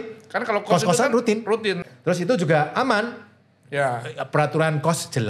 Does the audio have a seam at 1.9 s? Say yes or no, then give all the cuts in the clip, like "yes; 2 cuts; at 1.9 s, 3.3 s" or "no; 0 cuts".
yes; 1 cut; at 1.9 s